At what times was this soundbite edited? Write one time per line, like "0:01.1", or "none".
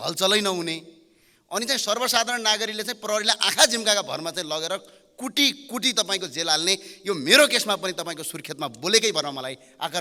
none